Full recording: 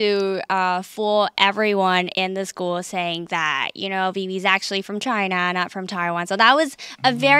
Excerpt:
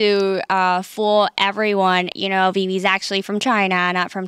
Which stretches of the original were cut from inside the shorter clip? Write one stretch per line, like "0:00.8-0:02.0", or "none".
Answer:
0:02.1-0:03.7